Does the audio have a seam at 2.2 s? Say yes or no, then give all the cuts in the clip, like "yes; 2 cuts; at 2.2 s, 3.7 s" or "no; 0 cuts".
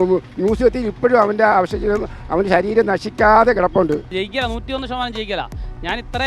no; 1 cut; at 4.2 s